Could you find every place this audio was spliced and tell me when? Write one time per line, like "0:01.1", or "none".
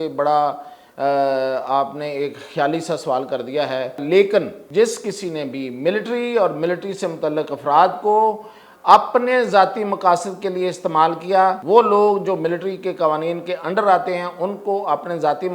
0:04.0
0:04.6
0:11.6